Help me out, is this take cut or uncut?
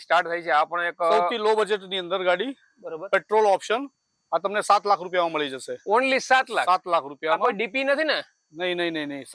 uncut